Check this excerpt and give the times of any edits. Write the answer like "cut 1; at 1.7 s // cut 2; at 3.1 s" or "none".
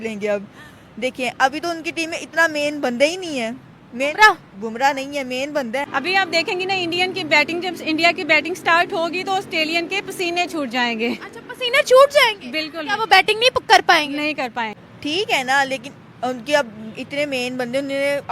cut 1; at 5.9 s // cut 2; at 14.8 s